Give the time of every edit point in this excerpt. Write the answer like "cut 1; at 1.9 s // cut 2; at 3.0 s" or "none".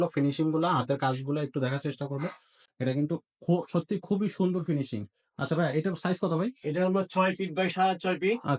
none

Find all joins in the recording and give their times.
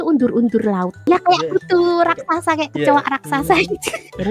cut 1; at 1.0 s

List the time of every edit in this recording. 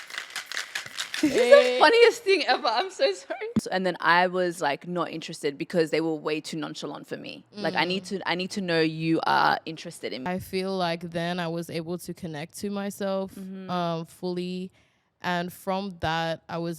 cut 1; at 3.6 s // cut 2; at 10.2 s

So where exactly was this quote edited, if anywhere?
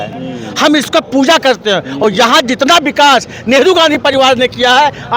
none

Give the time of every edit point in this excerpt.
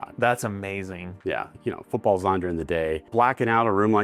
cut 1; at 1.5 s // cut 2; at 3.0 s

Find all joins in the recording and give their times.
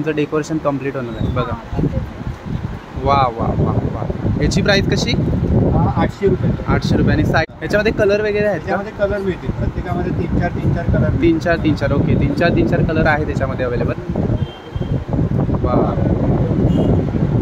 cut 1; at 7.7 s // cut 2; at 14.0 s

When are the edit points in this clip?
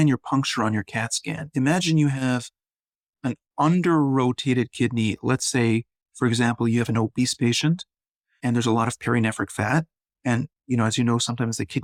none

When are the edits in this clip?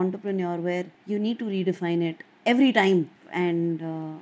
cut 1; at 1.0 s // cut 2; at 3.2 s

